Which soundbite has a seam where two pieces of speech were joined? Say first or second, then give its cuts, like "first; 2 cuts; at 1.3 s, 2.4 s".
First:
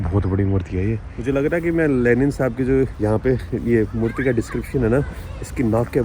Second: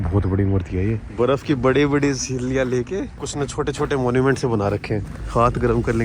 second; 3 cuts; at 1.0 s, 3.2 s, 5.2 s